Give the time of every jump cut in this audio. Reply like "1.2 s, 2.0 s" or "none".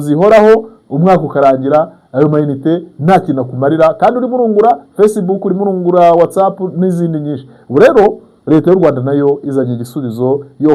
none